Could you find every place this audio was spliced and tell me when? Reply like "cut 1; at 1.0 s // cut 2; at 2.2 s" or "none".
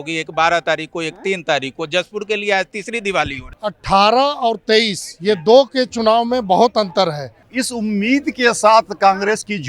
cut 1; at 3.4 s // cut 2; at 7.5 s